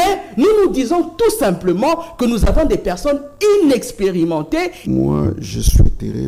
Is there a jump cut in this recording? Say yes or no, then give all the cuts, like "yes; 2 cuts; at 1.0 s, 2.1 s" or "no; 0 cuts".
yes; 1 cut; at 4.8 s